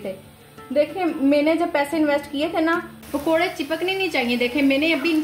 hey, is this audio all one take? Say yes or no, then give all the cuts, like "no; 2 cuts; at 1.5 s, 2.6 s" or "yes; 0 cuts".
no; 1 cut; at 3.0 s